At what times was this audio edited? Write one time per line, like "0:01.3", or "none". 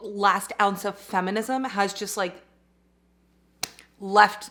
none